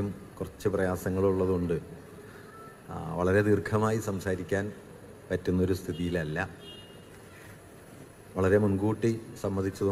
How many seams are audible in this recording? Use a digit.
1